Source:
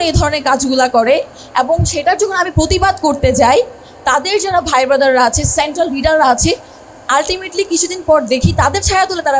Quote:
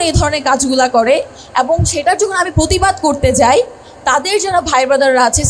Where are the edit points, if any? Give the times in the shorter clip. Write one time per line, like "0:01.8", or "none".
none